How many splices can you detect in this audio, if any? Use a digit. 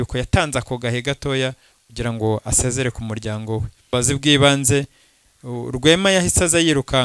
1